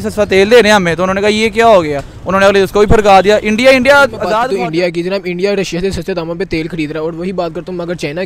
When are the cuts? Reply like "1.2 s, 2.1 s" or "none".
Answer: 4.4 s